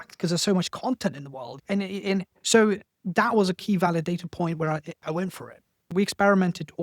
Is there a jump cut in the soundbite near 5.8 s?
yes; 1 cut; at 5.8 s

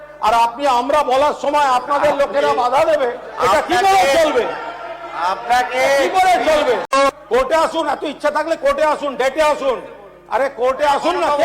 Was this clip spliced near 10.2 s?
no; 1 cut; at 6.9 s

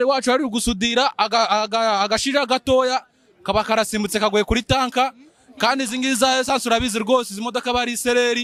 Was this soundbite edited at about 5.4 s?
no; 0 cuts

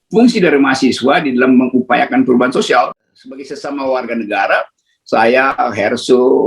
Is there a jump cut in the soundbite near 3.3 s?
yes; 1 cut; at 3.3 s

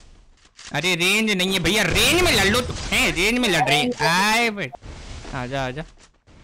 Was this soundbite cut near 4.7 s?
yes; 1 cut; at 4.7 s

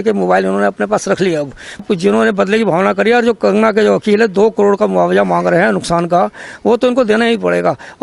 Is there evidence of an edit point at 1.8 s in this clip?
yes; 1 cut; at 1.8 s

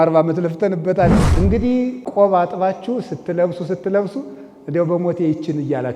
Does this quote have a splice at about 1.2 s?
yes; 1 cut; at 1.2 s

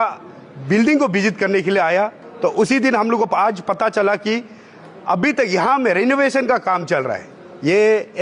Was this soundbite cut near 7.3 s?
no; 0 cuts

